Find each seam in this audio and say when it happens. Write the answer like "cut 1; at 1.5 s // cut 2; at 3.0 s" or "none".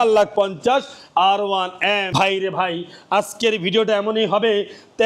cut 1; at 2.1 s